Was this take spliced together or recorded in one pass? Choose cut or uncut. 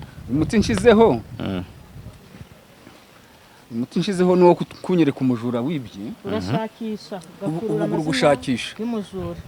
uncut